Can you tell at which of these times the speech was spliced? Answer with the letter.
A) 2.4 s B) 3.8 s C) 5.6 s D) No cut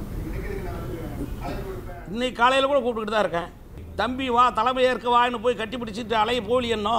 B